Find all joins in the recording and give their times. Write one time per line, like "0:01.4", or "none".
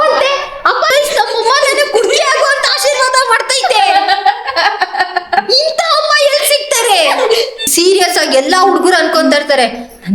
0:00.9
0:05.4
0:07.7